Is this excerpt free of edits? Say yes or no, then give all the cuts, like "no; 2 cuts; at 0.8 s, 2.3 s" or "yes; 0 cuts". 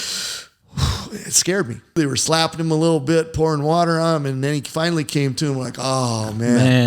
no; 1 cut; at 2.0 s